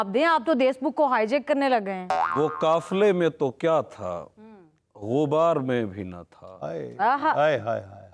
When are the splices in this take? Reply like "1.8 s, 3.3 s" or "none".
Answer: 2.2 s

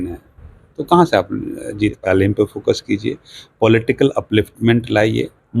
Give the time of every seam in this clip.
2.0 s

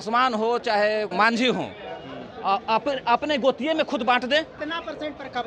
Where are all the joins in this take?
1.1 s, 4.6 s

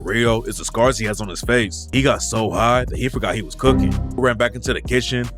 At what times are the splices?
1.8 s, 4.2 s

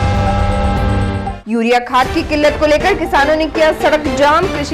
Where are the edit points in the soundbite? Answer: 1.2 s

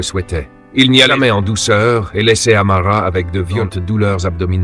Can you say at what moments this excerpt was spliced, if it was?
1.1 s, 3.6 s

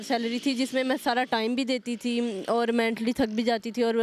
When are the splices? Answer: none

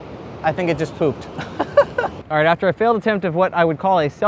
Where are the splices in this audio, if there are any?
2.1 s

